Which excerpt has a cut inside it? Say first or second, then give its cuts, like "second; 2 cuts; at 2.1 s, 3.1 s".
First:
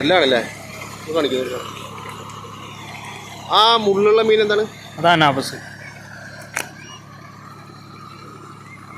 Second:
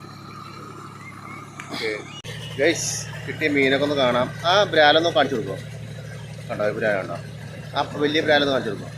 second; 1 cut; at 2.3 s